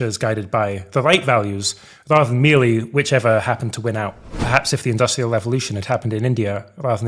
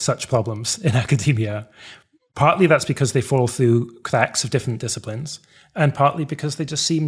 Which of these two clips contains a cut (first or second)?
first